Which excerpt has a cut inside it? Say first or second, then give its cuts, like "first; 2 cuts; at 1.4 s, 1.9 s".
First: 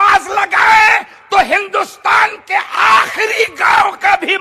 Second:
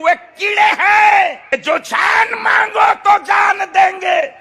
second; 1 cut; at 1.5 s